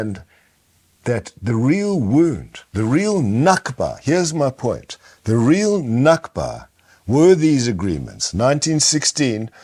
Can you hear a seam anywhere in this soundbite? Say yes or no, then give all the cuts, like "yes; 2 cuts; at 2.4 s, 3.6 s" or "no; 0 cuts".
no; 0 cuts